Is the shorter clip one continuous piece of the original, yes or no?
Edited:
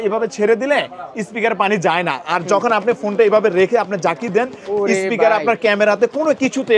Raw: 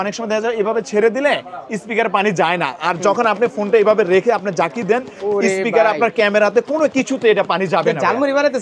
yes